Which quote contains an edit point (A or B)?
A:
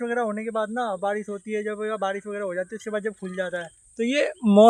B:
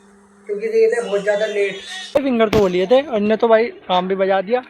B